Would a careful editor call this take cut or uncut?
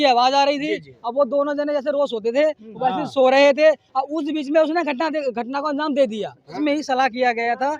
cut